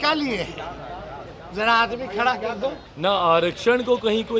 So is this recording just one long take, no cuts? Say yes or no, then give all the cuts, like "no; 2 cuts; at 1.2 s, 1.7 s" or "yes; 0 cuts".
no; 1 cut; at 2.9 s